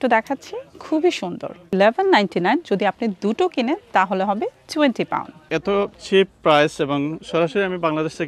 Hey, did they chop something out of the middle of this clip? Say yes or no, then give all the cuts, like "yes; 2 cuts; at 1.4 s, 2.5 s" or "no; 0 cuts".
yes; 2 cuts; at 1.7 s, 5.4 s